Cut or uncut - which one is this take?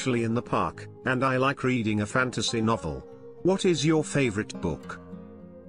uncut